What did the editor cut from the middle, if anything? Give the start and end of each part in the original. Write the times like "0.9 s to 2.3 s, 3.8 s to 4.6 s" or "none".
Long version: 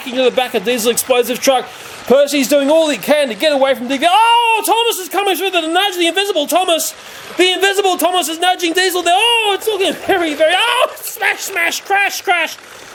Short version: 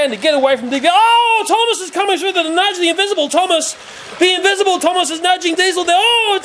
none